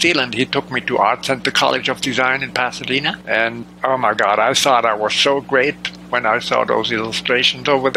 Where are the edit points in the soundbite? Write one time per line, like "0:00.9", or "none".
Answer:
0:03.4

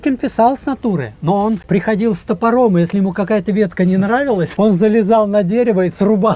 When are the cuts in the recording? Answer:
0:01.6
0:04.5

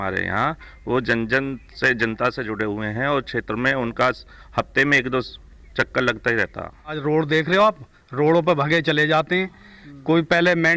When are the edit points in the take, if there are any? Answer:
0:07.0

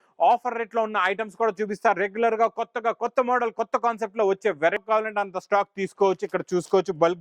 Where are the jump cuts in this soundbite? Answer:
0:04.8

